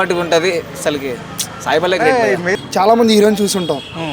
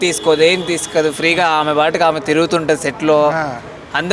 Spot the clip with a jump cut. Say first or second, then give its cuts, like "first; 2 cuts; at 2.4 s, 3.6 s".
first; 1 cut; at 2.5 s